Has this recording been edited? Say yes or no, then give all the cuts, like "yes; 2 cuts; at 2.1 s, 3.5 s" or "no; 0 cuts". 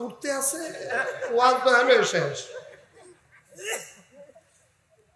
no; 0 cuts